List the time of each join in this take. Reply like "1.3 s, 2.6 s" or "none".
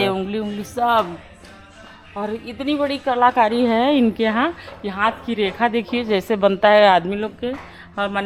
none